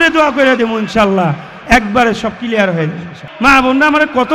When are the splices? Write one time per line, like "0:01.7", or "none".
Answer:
0:03.2